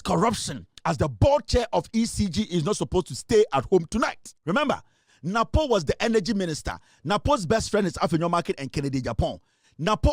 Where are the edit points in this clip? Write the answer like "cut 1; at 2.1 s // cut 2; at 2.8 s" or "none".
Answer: cut 1; at 4.3 s